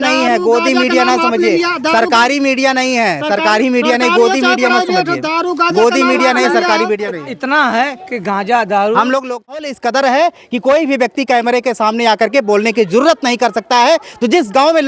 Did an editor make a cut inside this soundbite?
yes; 1 cut; at 9.7 s

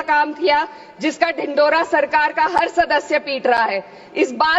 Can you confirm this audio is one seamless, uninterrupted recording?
yes; 0 cuts

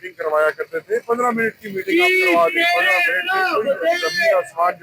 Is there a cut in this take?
no; 0 cuts

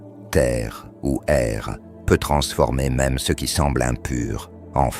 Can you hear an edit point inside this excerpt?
no; 0 cuts

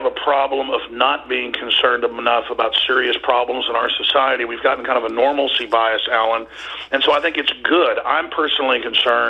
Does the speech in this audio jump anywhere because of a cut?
yes; 1 cut; at 3.4 s

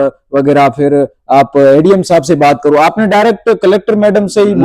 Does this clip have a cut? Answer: no; 0 cuts

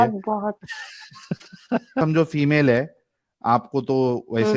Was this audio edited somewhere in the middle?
yes; 1 cut; at 2.0 s

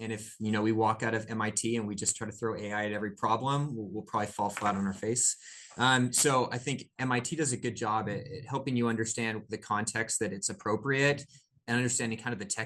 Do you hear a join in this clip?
no; 0 cuts

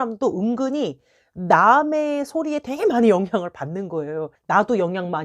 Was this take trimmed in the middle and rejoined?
yes; 1 cut; at 4.3 s

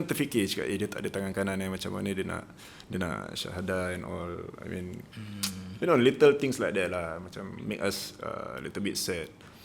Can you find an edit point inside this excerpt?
no; 0 cuts

